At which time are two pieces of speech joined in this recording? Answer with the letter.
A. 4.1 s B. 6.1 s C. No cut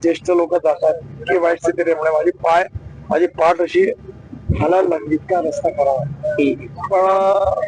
C